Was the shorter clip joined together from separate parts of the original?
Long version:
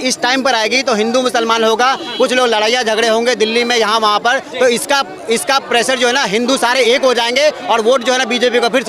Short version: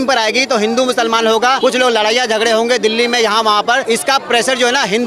yes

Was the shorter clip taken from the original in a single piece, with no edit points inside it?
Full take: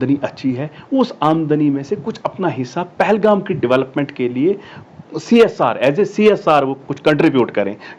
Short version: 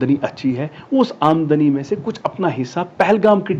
yes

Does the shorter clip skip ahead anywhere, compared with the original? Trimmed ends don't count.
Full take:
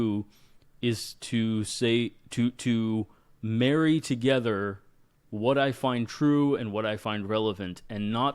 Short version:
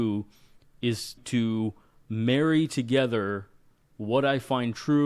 yes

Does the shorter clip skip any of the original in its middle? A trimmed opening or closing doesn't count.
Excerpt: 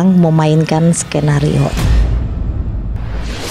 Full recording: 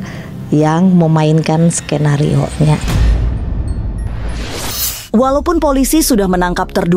yes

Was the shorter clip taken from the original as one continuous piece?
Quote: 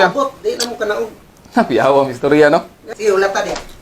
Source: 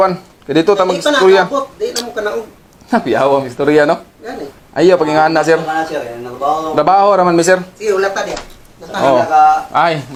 no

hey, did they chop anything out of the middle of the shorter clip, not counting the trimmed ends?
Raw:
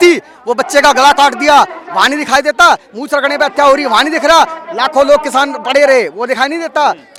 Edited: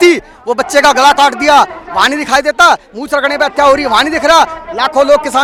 no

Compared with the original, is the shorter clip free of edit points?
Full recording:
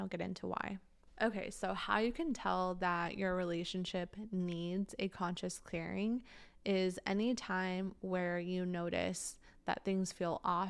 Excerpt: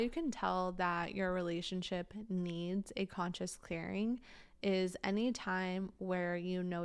yes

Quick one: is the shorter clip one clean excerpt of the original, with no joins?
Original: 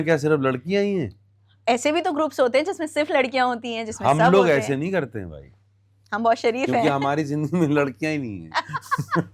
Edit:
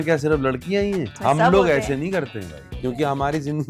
no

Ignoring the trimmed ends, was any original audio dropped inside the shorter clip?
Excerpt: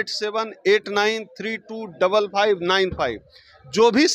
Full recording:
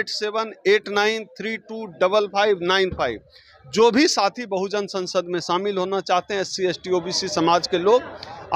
no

